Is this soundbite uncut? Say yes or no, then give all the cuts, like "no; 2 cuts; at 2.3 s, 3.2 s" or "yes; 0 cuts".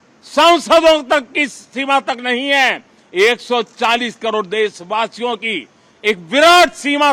yes; 0 cuts